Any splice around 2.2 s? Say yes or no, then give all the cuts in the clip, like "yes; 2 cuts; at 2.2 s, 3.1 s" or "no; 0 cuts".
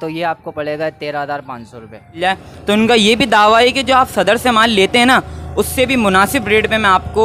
yes; 1 cut; at 2.2 s